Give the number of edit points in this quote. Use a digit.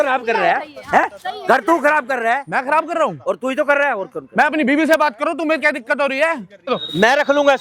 1